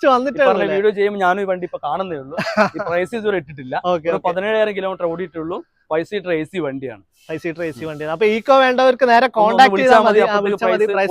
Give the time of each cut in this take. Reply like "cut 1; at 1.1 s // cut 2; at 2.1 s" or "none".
none